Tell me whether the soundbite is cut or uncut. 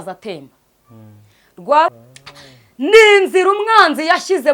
cut